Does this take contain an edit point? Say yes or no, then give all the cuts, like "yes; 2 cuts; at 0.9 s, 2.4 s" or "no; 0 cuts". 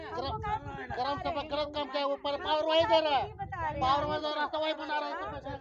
no; 0 cuts